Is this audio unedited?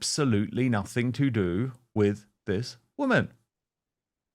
yes; 0 cuts

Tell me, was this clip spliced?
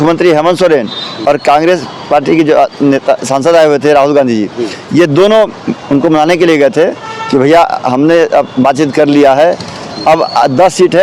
no; 0 cuts

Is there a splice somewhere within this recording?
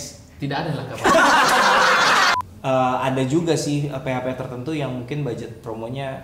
yes; 1 cut; at 2.3 s

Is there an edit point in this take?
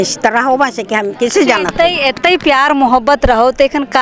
no; 0 cuts

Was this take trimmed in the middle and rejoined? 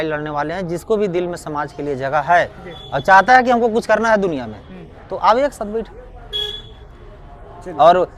no; 0 cuts

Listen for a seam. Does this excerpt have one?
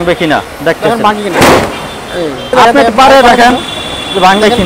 yes; 1 cut; at 2.5 s

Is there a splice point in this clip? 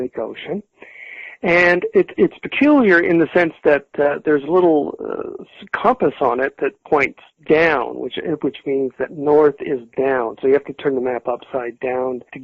yes; 1 cut; at 5.8 s

